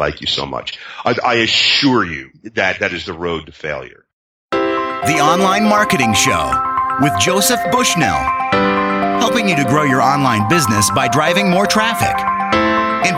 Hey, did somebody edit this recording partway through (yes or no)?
yes